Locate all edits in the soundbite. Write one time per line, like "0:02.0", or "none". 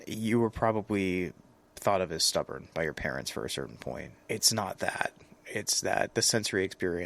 0:04.1